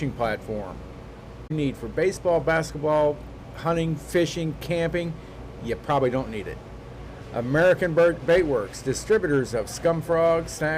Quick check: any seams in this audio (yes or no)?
yes